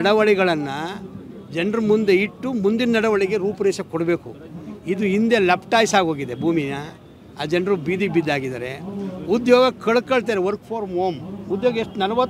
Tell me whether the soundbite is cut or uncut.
uncut